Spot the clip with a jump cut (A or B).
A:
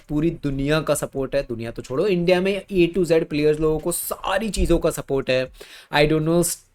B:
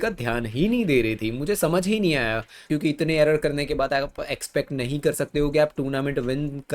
B